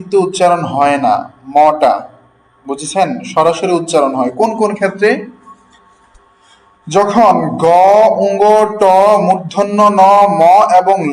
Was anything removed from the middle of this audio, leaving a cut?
no; 0 cuts

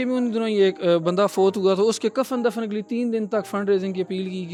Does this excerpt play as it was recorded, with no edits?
yes; 0 cuts

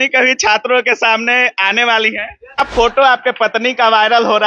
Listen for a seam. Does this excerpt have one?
yes; 1 cut; at 2.6 s

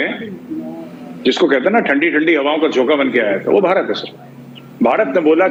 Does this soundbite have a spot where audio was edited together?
no; 0 cuts

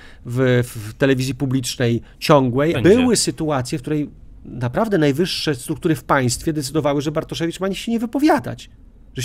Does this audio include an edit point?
yes; 1 cut; at 2.8 s

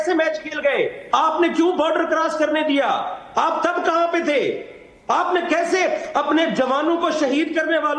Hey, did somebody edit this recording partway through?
no; 0 cuts

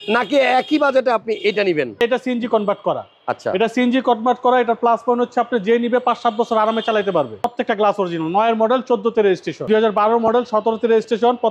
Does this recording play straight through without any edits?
no; 3 cuts; at 2.0 s, 7.5 s, 9.6 s

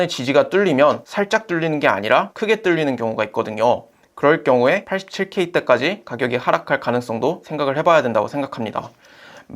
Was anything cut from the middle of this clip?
yes; 2 cuts; at 1.1 s, 2.3 s

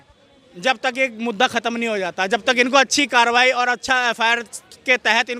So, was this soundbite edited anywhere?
no; 0 cuts

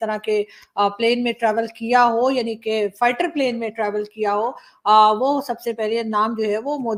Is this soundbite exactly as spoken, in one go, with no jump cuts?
yes; 0 cuts

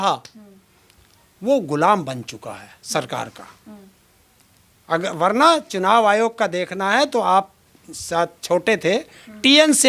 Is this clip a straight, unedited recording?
yes; 0 cuts

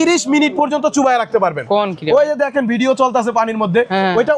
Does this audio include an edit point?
no; 0 cuts

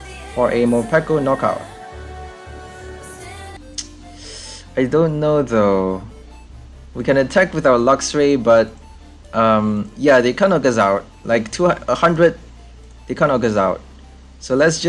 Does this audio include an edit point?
yes; 1 cut; at 3.6 s

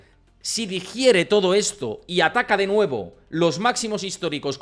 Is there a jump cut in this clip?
no; 0 cuts

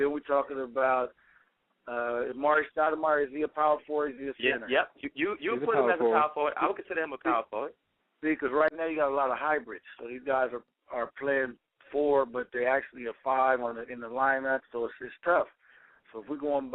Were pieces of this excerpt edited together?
yes; 1 cut; at 2.2 s

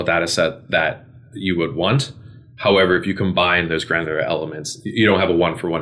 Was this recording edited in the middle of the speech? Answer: no; 0 cuts

